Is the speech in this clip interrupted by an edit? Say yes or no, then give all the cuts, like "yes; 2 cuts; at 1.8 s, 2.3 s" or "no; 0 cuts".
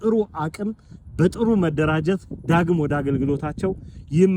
no; 0 cuts